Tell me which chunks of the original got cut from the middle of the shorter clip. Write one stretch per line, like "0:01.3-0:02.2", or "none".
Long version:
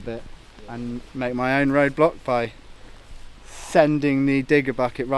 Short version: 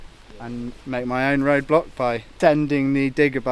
0:02.5-0:03.6